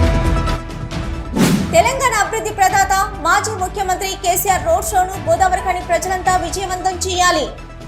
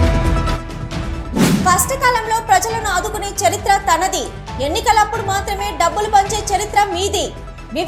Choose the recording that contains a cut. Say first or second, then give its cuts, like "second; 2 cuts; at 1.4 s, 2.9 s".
first; 1 cut; at 1.6 s